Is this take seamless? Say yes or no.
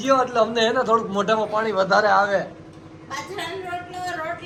yes